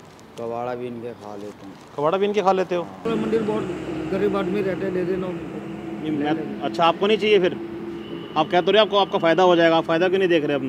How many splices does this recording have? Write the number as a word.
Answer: one